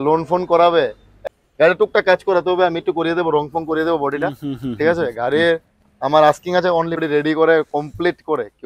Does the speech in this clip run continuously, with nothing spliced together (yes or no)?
no